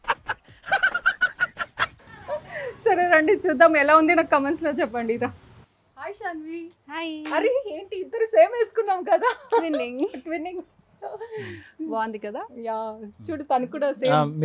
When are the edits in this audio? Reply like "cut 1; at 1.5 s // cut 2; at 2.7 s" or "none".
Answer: none